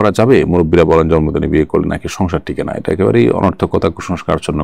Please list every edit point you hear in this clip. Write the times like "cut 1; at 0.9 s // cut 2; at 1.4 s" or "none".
none